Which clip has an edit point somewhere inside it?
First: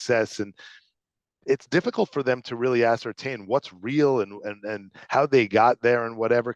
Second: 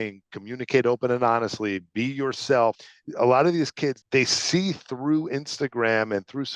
second; 2 cuts; at 2.8 s, 4.0 s

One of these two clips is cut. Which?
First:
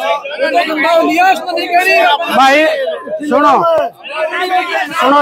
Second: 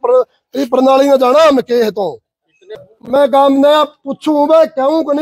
second; 1 cut; at 2.9 s

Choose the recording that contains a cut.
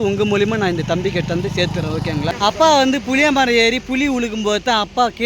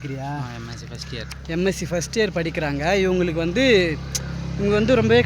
first; 1 cut; at 2.5 s

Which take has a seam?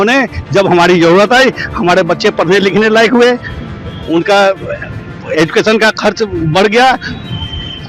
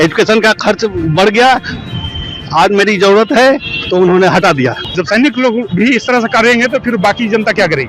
second; 1 cut; at 4.8 s

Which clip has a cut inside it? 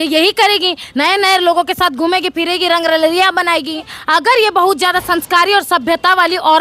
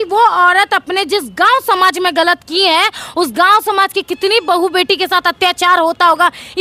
first; 1 cut; at 3.9 s

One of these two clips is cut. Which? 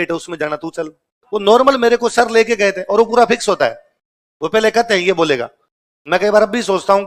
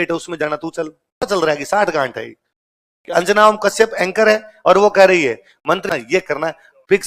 second; 2 cuts; at 1.3 s, 5.8 s

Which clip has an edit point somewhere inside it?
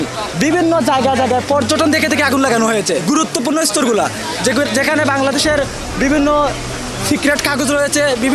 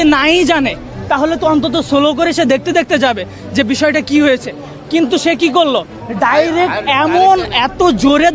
first; 1 cut; at 3.0 s

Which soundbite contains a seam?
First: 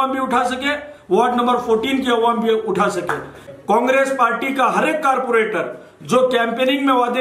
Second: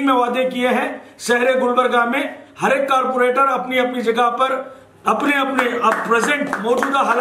first; 1 cut; at 3.5 s

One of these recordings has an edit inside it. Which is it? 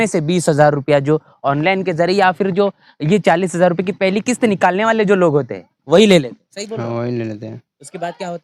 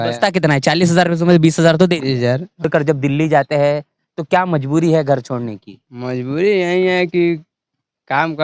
second; 1 cut; at 2.7 s

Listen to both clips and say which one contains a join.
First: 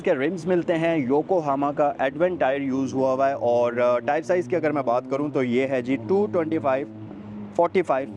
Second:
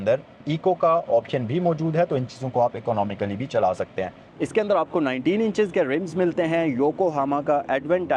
second; 1 cut; at 4.2 s

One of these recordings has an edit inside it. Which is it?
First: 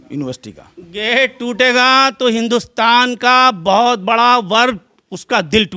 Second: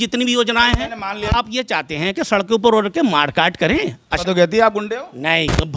second; 2 cuts; at 1.2 s, 4.1 s

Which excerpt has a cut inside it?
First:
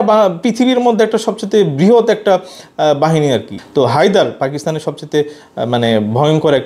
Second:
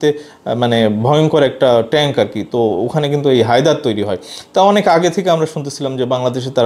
first; 1 cut; at 3.5 s

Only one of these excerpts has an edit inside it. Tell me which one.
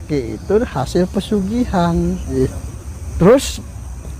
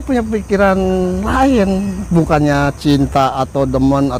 first; 1 cut; at 2.3 s

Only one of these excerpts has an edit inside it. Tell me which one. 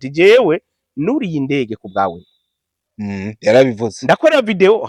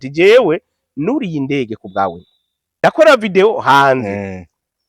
second; 1 cut; at 2.7 s

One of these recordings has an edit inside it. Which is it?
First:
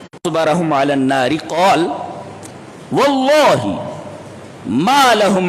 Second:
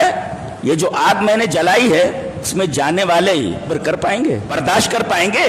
second; 3 cuts; at 2.5 s, 3.7 s, 4.6 s

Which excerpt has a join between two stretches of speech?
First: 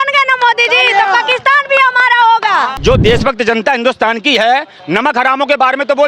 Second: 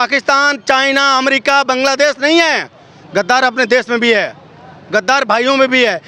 first; 1 cut; at 2.7 s

